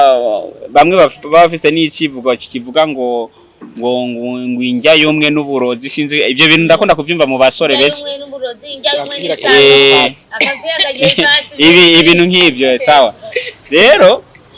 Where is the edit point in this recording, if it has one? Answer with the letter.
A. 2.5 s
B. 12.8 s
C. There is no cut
C